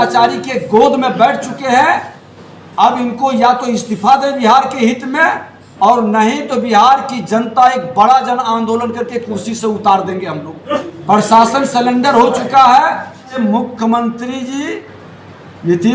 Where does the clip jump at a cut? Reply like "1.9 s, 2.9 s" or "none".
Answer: 10.9 s, 13.3 s